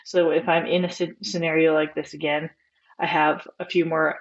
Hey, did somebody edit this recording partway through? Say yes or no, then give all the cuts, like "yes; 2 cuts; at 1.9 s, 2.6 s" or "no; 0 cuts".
no; 0 cuts